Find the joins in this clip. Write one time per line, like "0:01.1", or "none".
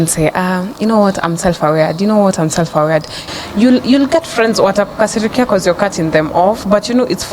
0:03.2